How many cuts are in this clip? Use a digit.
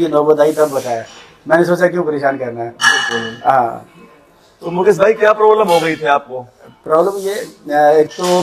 0